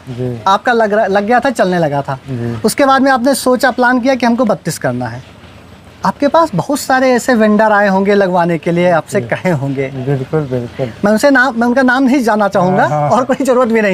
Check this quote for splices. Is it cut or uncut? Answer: uncut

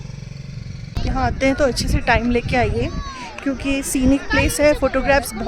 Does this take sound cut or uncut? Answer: cut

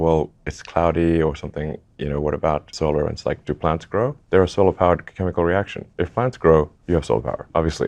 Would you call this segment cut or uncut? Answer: uncut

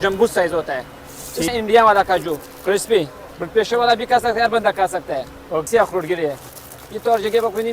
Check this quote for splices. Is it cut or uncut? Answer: cut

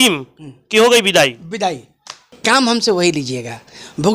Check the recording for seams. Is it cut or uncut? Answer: cut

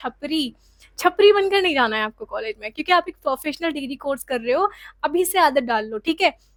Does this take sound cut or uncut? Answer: uncut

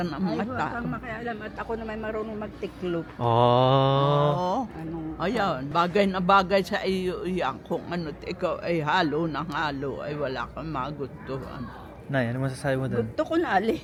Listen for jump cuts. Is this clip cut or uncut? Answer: uncut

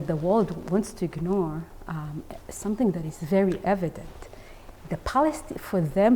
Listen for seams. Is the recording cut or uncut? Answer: uncut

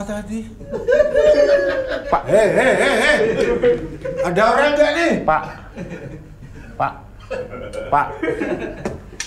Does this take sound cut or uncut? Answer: uncut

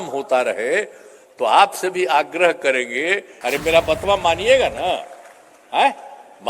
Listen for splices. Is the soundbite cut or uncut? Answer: cut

